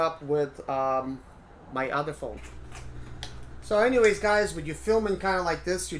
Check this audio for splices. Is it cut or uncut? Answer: cut